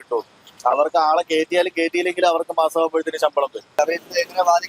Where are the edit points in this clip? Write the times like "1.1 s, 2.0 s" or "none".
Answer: 3.6 s